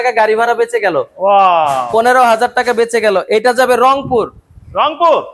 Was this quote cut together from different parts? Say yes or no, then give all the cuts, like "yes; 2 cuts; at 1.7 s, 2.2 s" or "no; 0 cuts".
no; 0 cuts